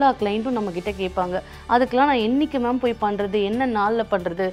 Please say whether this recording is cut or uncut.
uncut